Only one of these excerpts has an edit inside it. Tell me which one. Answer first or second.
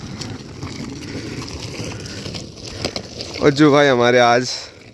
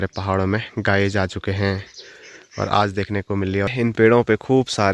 second